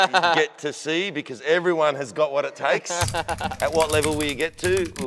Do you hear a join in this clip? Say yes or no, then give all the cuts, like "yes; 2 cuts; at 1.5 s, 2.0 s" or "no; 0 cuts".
no; 0 cuts